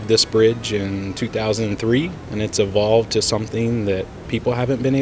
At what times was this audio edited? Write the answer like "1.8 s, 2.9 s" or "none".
2.2 s, 4.2 s

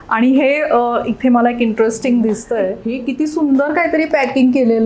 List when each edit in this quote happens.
2.9 s

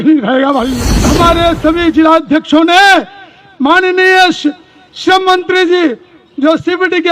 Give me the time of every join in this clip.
1.1 s

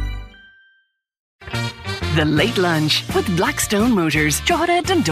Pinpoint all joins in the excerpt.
1.2 s

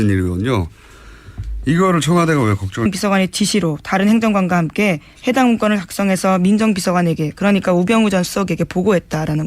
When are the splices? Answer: none

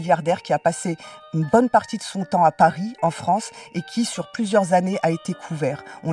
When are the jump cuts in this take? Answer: none

